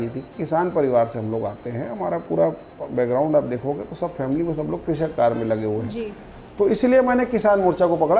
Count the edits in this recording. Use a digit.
0